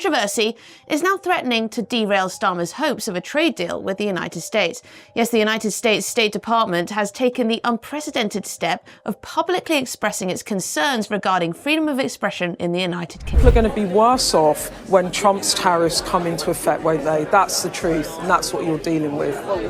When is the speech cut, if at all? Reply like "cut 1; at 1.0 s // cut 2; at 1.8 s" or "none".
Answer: cut 1; at 13.4 s